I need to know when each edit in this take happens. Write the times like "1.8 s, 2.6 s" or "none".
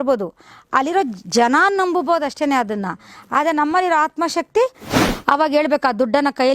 4.9 s

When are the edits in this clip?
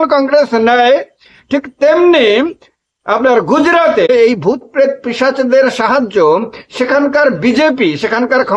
4.1 s

